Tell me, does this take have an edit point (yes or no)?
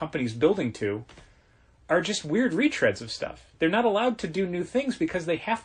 no